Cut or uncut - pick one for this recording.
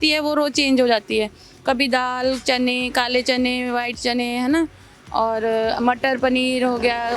uncut